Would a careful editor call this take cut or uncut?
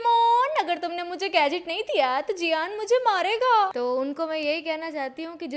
cut